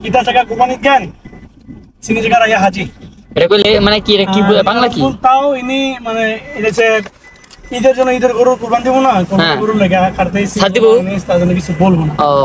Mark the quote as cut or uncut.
uncut